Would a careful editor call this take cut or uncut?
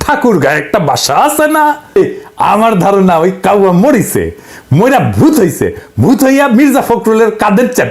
cut